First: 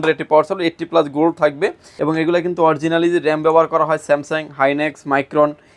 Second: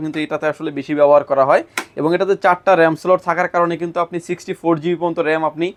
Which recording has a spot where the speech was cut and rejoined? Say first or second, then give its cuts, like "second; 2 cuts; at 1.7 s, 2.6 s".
first; 1 cut; at 1.9 s